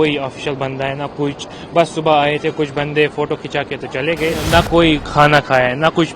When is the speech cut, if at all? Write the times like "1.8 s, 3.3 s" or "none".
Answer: 4.6 s